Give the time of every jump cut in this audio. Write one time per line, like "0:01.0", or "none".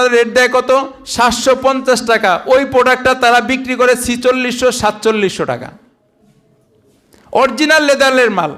none